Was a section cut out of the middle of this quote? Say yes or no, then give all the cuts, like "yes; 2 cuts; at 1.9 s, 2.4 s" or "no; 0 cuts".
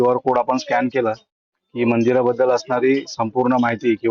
no; 0 cuts